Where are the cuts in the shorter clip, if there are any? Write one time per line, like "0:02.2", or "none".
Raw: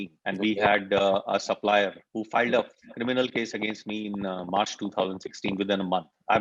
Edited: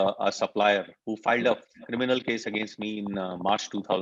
none